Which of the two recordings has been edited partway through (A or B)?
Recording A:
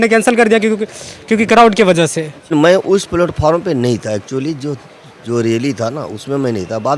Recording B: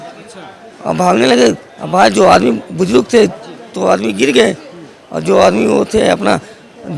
A